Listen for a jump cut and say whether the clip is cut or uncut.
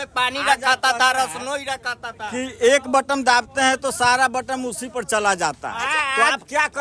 uncut